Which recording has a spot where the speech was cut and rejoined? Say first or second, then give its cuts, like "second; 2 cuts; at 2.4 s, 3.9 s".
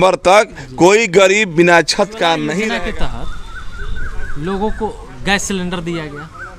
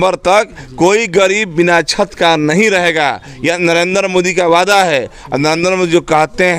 first; 1 cut; at 2.7 s